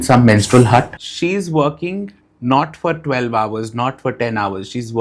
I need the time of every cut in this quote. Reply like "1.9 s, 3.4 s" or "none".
1.0 s

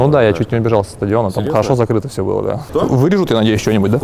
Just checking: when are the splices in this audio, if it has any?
2.6 s

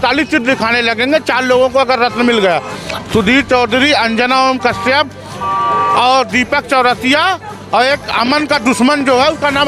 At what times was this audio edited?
none

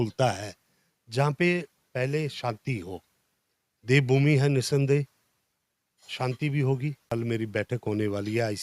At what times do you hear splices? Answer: 7.1 s

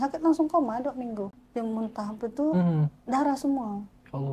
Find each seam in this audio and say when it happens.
1.4 s

